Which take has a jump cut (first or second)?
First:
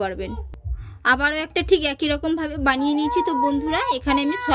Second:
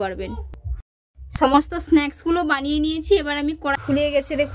second